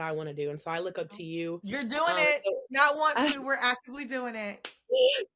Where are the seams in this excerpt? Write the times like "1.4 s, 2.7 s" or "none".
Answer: none